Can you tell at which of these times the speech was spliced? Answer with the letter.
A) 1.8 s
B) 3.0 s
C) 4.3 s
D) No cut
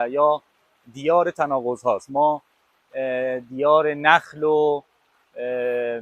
D